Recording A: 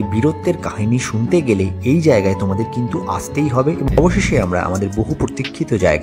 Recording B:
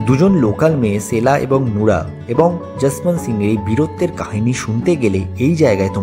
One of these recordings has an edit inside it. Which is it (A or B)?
A